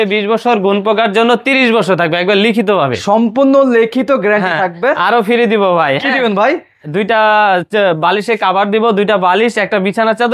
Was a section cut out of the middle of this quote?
no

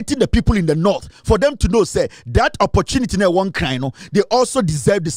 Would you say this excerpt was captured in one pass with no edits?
yes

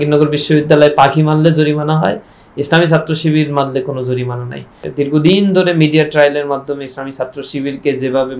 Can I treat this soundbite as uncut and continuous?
no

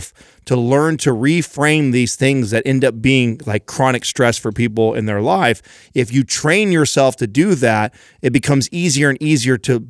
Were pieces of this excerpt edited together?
no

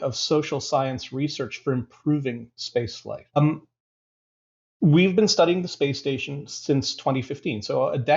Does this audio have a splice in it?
yes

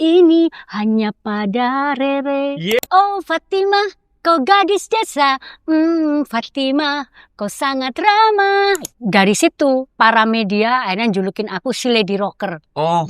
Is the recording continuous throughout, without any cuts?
no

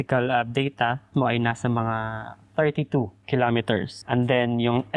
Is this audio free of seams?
no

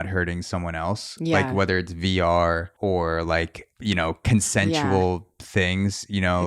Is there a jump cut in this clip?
yes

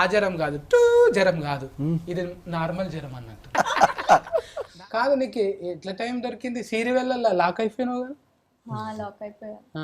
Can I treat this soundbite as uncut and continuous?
no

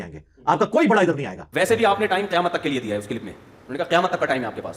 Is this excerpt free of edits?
no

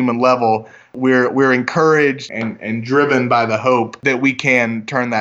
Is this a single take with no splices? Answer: no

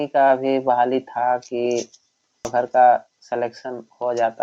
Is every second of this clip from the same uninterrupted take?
no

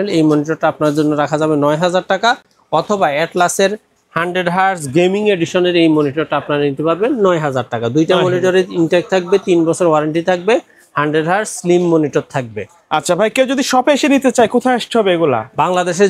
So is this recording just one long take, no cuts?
yes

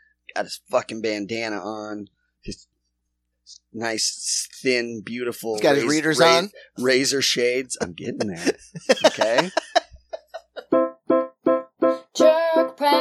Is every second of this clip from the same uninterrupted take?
no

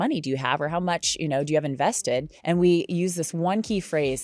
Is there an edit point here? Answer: yes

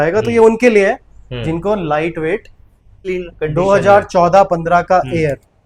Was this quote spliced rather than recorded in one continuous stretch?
yes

